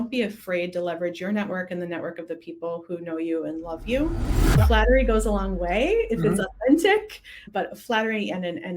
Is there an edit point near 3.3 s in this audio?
no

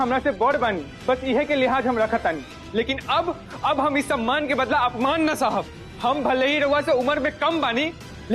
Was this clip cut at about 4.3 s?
no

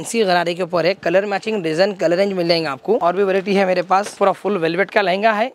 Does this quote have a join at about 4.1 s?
yes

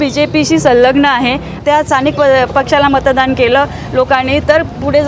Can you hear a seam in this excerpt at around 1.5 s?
yes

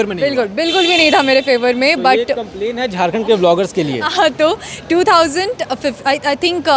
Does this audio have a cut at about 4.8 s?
no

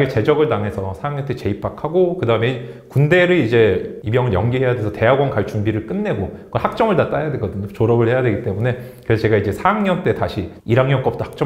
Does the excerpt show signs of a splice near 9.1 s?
no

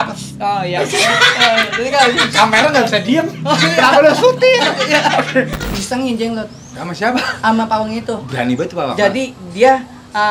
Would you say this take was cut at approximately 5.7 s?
yes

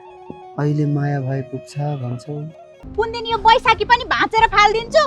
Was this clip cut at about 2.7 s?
yes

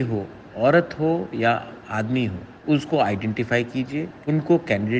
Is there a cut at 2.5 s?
yes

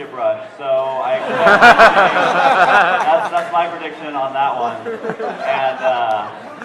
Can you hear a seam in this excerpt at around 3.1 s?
yes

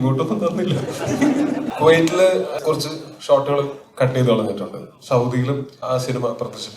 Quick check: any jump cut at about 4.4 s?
no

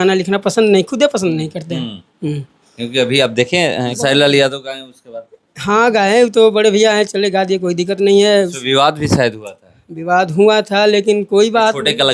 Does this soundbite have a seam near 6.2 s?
no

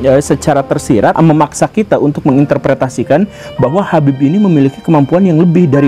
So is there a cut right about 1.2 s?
yes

